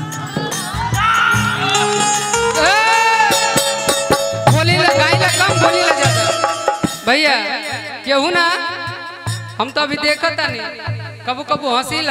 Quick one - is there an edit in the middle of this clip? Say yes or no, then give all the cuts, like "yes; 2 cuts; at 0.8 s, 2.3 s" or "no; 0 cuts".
no; 0 cuts